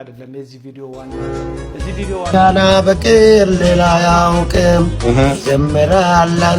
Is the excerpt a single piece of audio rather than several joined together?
no; 1 cut; at 1.1 s

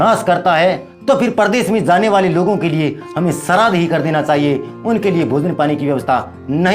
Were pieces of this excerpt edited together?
yes; 1 cut; at 0.9 s

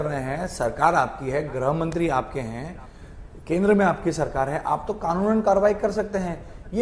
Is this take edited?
no; 0 cuts

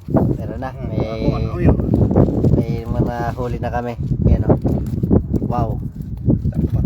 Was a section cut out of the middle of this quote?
no; 0 cuts

